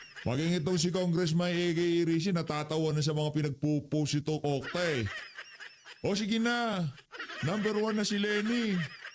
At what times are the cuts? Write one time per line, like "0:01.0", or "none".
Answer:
0:02.1

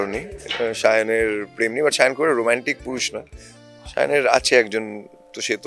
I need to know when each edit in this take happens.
none

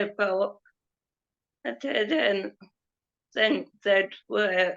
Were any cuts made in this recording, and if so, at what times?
none

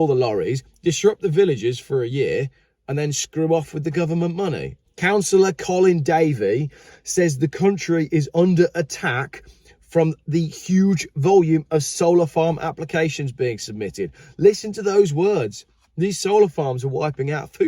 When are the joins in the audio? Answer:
0:04.7

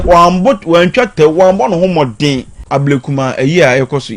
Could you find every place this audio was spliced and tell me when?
0:02.6

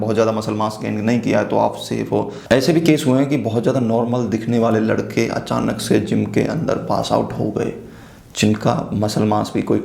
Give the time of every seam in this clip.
none

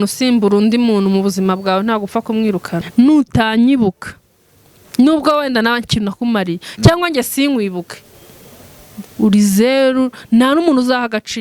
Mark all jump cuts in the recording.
0:02.8

